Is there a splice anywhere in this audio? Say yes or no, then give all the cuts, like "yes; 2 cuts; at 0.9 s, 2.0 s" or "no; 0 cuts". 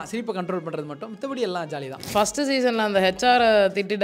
yes; 1 cut; at 2.1 s